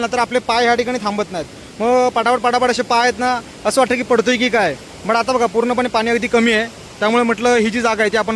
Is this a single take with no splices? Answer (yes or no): yes